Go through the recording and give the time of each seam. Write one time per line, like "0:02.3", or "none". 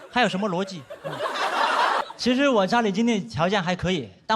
0:02.0

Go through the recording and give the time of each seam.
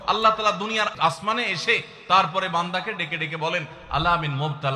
0:00.9

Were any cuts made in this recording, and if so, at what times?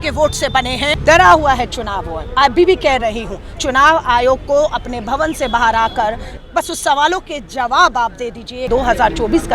0:01.0
0:06.3
0:08.6

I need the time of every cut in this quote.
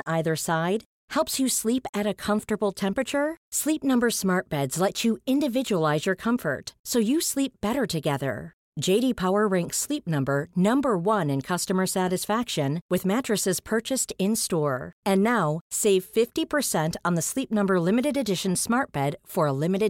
none

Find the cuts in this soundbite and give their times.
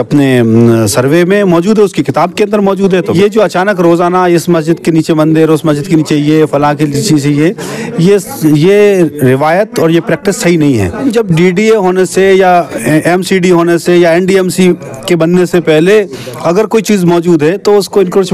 0:03.1
0:11.1

